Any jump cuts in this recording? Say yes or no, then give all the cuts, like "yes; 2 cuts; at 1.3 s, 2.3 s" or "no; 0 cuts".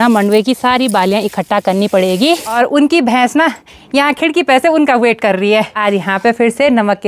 yes; 2 cuts; at 2.5 s, 5.7 s